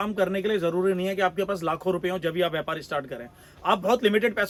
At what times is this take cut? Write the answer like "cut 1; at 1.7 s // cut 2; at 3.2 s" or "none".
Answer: none